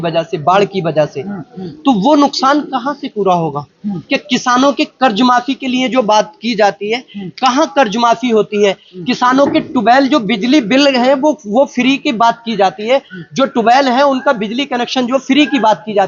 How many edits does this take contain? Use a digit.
0